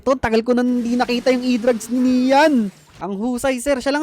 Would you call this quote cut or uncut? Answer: cut